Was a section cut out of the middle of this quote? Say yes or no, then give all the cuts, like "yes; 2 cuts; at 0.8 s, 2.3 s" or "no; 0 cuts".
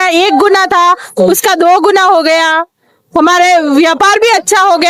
no; 0 cuts